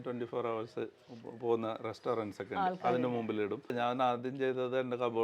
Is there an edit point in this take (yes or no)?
yes